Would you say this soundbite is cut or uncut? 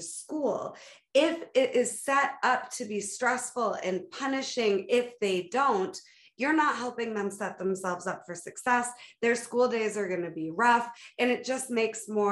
uncut